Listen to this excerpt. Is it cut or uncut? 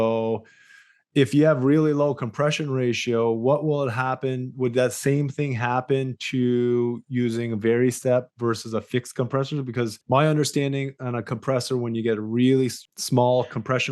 cut